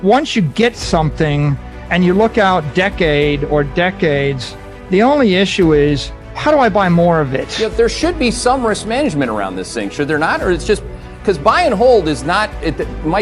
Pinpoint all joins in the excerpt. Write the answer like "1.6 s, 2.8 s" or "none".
7.4 s

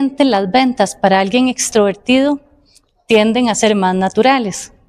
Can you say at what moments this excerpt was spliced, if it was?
none

